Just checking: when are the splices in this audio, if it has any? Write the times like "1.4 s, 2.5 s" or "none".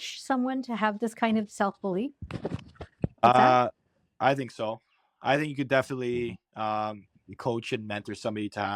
none